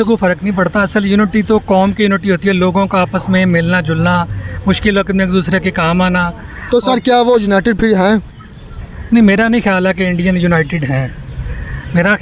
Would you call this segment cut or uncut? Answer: uncut